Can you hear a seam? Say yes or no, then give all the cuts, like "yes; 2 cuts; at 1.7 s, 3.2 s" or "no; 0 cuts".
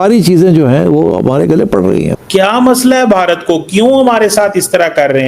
yes; 1 cut; at 2.2 s